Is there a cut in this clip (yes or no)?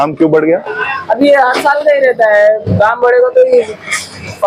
no